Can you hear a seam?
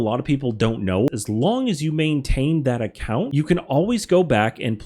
yes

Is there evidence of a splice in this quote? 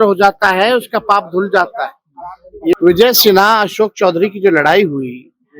yes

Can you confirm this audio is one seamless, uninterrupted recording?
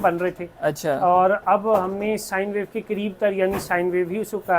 yes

